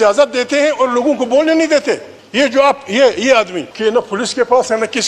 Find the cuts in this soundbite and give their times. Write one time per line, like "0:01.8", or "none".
0:02.2
0:03.6